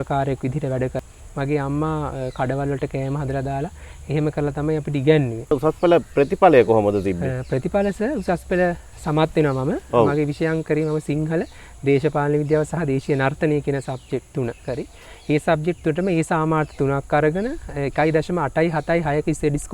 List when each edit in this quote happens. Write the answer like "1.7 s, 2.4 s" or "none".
1.0 s, 5.4 s